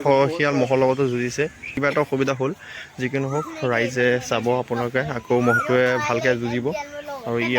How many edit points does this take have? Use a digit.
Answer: 1